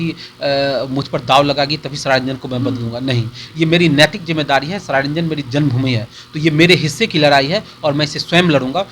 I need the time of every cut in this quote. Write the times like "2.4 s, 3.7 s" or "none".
none